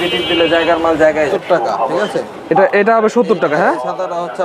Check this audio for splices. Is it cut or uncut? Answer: cut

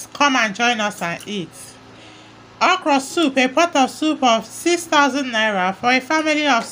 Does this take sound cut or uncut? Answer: uncut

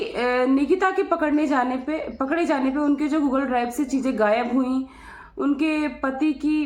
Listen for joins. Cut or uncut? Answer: uncut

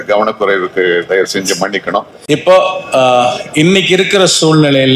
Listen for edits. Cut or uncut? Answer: cut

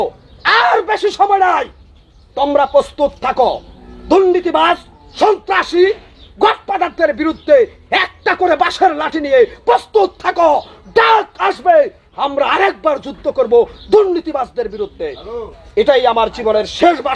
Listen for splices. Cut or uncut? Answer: uncut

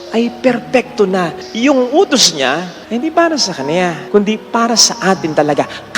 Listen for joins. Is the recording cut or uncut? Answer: cut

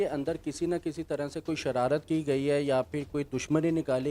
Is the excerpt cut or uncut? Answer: uncut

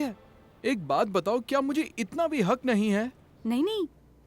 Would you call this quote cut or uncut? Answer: cut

